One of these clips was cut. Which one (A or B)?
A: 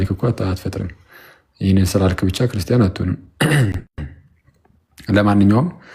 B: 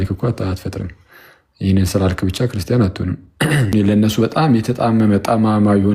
B